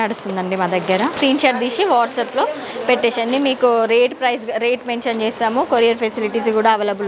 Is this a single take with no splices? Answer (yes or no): no